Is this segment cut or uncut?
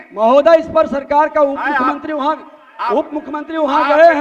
uncut